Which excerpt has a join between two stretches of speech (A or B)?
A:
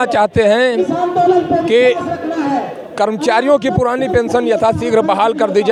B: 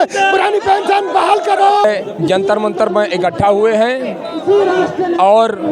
B